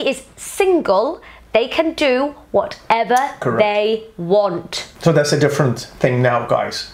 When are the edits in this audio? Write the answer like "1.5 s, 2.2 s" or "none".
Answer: none